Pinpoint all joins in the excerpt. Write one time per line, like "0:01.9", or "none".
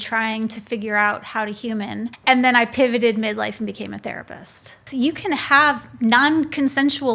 0:02.1
0:04.8

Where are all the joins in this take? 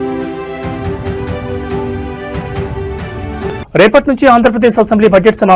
0:03.2

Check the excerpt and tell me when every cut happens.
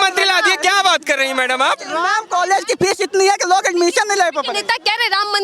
0:02.1

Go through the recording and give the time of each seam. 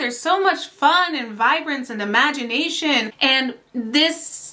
0:03.1

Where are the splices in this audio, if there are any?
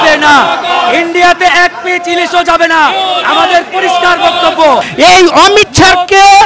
0:04.9

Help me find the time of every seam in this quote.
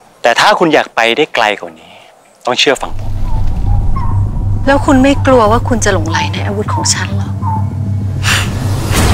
0:03.1

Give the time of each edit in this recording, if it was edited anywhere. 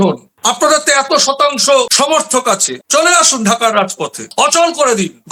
none

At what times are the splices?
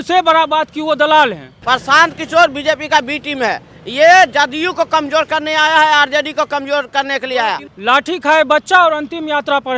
0:01.5
0:07.7

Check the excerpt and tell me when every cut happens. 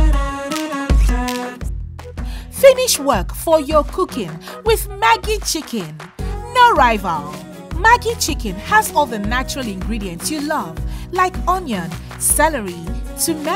0:01.1

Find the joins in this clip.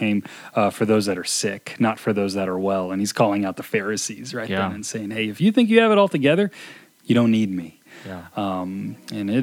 none

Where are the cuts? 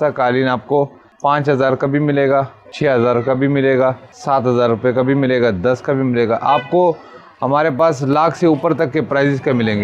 0:01.0
0:02.6
0:04.1

